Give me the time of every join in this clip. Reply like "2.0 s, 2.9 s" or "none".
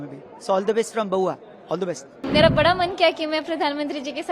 2.1 s